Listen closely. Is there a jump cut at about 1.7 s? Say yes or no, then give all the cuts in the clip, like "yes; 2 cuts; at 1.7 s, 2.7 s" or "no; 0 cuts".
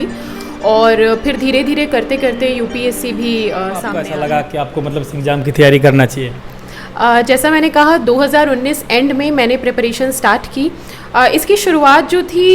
no; 1 cut; at 3.9 s